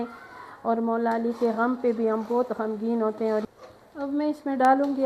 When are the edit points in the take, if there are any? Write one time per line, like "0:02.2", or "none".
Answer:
0:03.5